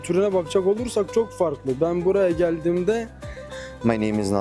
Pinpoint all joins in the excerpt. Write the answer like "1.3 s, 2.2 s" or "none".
3.5 s